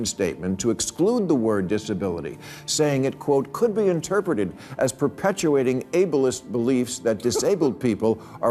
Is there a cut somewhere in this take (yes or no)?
no